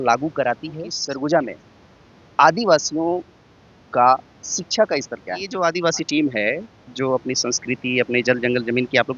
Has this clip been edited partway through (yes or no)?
yes